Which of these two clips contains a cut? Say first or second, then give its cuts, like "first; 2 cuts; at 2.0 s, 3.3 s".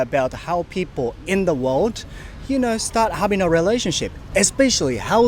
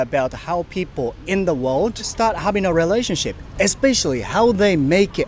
second; 1 cut; at 2.1 s